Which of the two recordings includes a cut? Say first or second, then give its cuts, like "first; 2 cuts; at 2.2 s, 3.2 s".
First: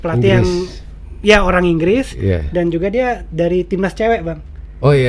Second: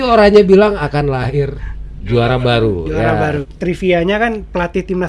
second; 1 cut; at 3.4 s